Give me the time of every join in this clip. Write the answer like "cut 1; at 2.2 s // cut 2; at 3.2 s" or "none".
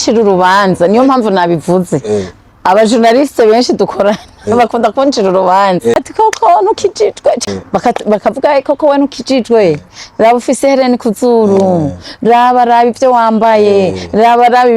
cut 1; at 6.0 s // cut 2; at 7.4 s